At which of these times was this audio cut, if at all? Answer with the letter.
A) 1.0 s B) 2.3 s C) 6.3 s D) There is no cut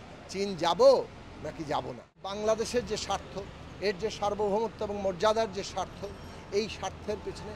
B